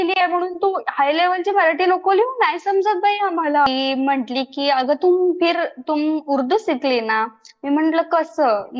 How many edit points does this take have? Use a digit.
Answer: 1